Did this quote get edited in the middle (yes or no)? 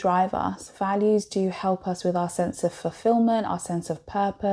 no